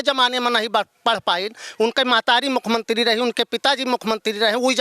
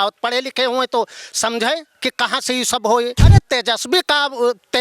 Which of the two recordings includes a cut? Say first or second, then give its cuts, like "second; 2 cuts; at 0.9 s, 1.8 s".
second; 1 cut; at 3.2 s